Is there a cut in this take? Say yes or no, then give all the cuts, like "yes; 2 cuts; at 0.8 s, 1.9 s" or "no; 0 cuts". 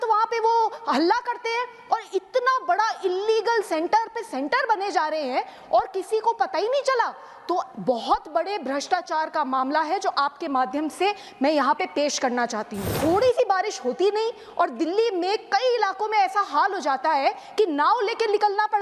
yes; 1 cut; at 12.9 s